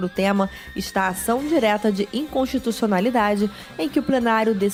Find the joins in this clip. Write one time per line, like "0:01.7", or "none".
none